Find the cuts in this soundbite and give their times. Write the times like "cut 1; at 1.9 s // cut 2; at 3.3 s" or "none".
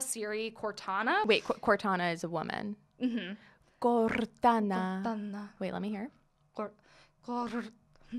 cut 1; at 1.2 s